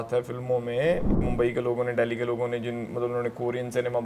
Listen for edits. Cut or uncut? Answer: cut